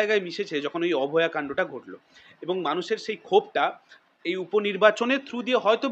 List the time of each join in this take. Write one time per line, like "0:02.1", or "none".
none

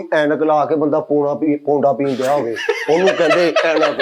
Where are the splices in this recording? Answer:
none

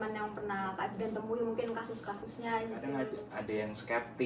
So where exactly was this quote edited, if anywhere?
0:03.1

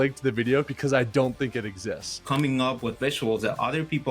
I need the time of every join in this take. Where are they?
0:02.2

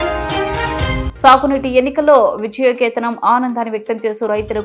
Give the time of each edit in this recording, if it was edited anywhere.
0:01.1

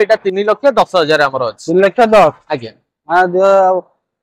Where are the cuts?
none

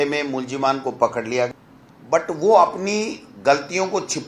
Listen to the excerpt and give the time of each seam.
0:01.5

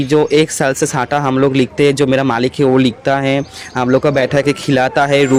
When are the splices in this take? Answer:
none

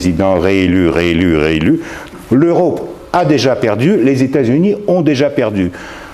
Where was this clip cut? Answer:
0:02.1

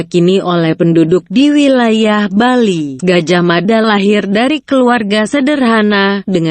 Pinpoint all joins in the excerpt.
0:01.5

